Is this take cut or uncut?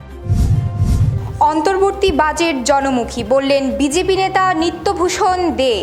uncut